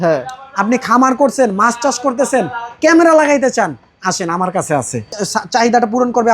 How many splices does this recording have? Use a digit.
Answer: 1